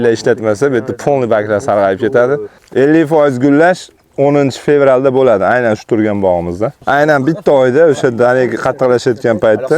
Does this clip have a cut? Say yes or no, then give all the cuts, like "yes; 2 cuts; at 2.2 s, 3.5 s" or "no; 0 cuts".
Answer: yes; 2 cuts; at 2.6 s, 6.7 s